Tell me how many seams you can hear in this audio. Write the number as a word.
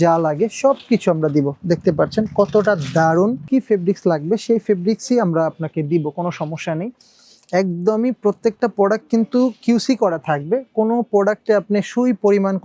one